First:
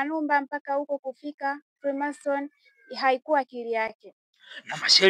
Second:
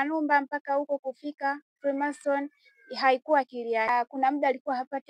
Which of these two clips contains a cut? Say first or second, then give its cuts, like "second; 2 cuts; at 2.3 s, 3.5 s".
second; 1 cut; at 3.9 s